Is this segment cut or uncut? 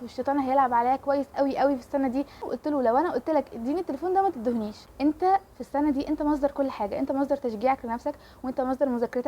cut